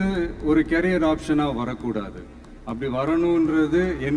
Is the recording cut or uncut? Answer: uncut